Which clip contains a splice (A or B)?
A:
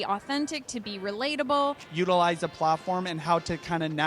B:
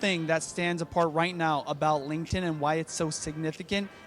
A